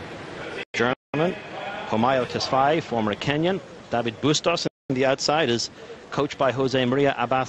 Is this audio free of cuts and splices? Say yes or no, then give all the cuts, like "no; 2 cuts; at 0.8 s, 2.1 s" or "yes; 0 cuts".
no; 1 cut; at 4.1 s